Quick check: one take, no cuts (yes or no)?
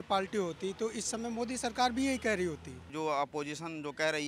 no